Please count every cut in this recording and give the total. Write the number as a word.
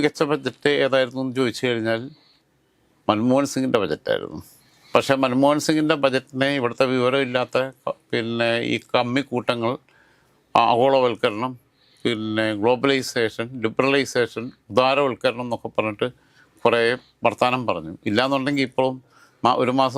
zero